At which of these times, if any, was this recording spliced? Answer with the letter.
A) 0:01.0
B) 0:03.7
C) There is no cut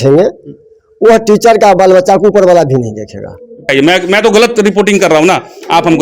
B